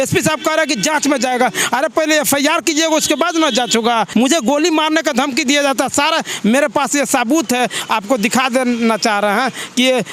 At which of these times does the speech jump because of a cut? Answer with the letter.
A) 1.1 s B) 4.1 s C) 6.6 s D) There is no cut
B